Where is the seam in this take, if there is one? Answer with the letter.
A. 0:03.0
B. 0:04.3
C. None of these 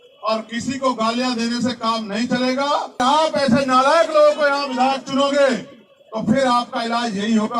A